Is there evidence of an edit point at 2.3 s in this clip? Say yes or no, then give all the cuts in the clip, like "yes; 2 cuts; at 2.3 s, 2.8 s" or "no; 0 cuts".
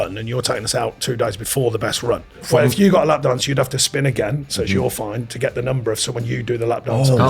yes; 1 cut; at 2.3 s